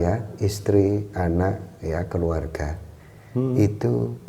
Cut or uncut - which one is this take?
uncut